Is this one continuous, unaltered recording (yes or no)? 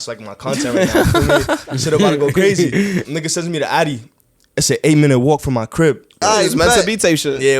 no